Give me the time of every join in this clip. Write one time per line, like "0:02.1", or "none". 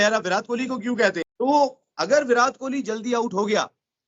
0:01.3